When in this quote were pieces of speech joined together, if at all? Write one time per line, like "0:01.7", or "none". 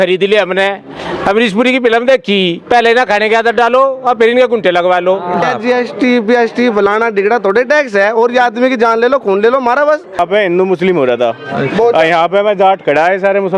0:05.4
0:10.2

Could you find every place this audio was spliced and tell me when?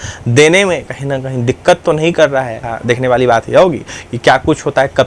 0:02.6

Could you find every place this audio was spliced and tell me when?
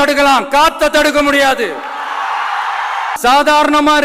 0:03.1

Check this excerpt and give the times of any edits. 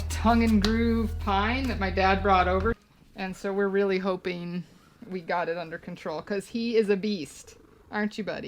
0:02.8

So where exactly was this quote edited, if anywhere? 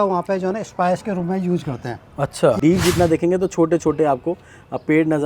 0:02.6

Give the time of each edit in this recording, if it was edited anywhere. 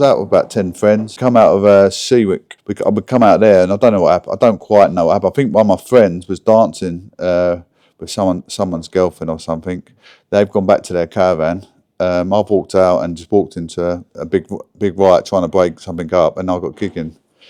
0:01.1
0:02.5

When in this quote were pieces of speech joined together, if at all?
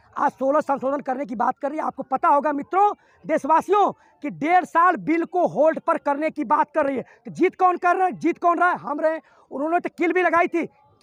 none

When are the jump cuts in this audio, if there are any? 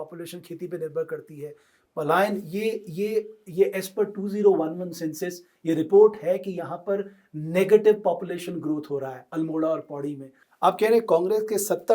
0:10.4

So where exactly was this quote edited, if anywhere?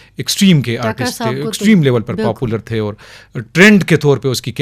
none

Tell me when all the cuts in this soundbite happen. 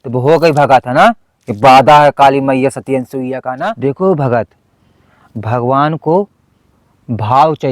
0:03.6

